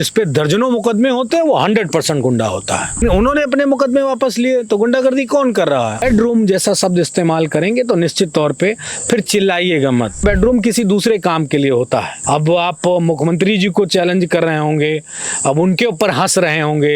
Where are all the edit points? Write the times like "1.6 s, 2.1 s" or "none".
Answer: 3.0 s, 6.0 s, 10.2 s, 12.1 s